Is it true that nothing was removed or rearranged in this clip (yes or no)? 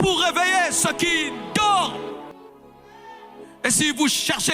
no